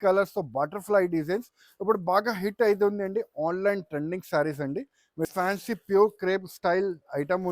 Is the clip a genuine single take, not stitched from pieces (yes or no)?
no